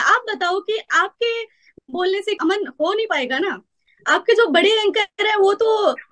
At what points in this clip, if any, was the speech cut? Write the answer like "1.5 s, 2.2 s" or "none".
2.4 s

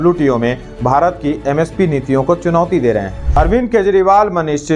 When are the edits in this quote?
3.2 s

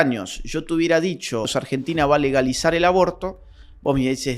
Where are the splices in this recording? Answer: 1.5 s

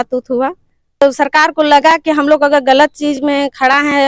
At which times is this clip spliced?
1.0 s

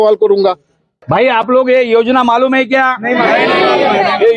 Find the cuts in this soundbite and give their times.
1.1 s

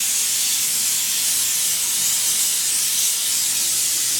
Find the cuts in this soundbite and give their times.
1.5 s

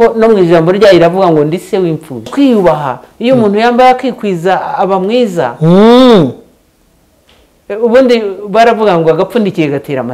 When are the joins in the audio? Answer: 2.3 s

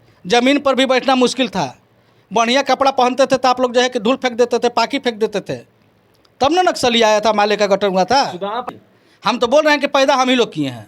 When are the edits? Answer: 8.6 s

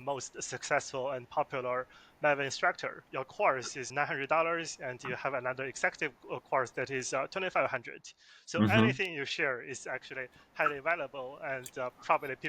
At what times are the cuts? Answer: 3.0 s, 3.9 s

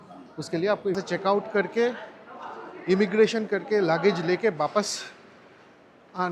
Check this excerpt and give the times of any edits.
0.9 s

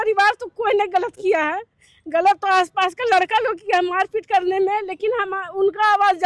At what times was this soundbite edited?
none

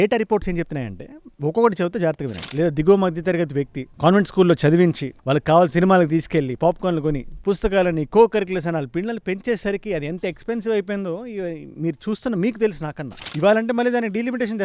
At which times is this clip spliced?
2.4 s, 13.2 s

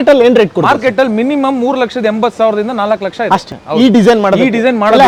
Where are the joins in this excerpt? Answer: none

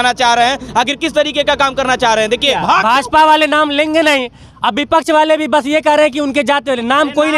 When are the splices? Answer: 2.6 s

